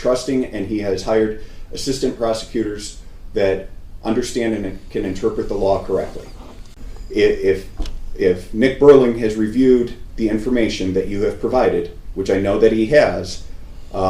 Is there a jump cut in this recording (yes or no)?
yes